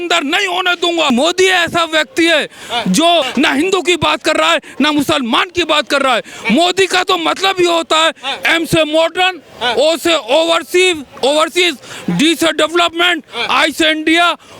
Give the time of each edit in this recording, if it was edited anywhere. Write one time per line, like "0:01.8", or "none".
0:01.1
0:03.3